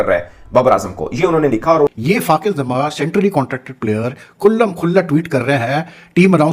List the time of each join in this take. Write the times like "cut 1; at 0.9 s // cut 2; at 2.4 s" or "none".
cut 1; at 2.0 s